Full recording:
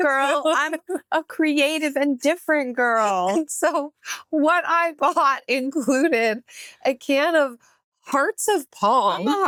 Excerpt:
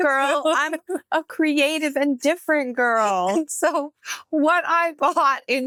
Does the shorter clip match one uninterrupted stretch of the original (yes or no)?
yes